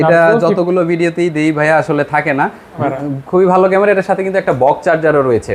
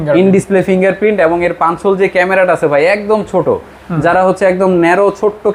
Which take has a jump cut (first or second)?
first